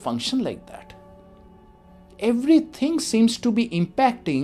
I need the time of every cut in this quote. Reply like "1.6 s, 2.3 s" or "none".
none